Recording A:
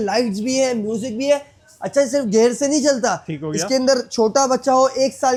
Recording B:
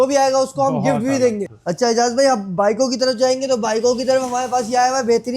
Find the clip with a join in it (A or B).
B